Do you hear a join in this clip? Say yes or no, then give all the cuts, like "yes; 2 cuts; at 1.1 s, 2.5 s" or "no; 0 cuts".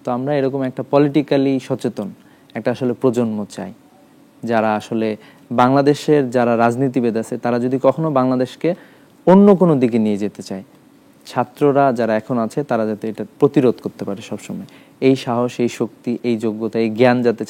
no; 0 cuts